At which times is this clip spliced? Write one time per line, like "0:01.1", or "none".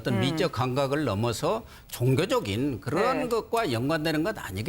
0:03.1